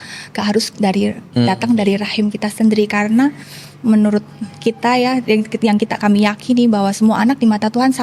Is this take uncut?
yes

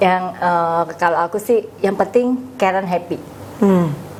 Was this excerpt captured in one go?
yes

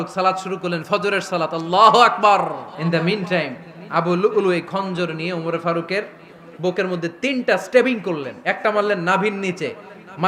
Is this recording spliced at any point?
yes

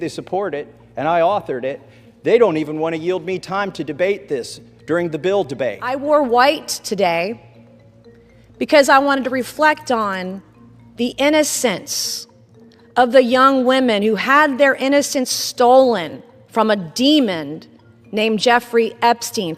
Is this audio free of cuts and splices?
no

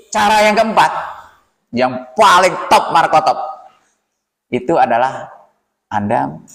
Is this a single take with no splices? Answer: yes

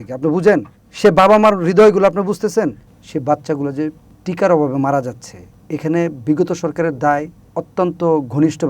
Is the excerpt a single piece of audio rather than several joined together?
no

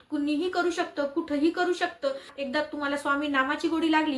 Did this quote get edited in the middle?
yes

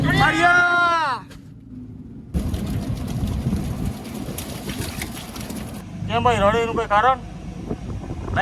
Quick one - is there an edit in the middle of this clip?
yes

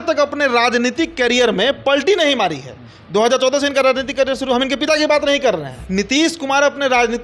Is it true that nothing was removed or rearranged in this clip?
no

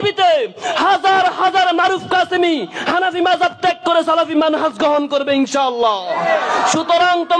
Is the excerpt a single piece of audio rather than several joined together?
yes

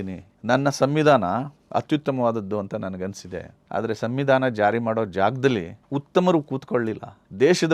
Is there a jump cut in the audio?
no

